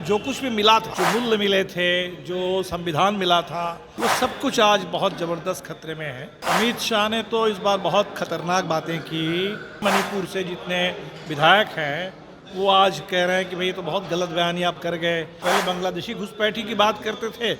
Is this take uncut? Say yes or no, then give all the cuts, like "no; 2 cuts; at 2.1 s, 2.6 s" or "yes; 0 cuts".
no; 5 cuts; at 0.9 s, 3.8 s, 6.4 s, 9.8 s, 15.4 s